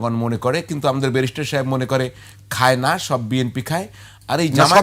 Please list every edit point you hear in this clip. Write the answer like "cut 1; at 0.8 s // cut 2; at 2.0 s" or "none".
none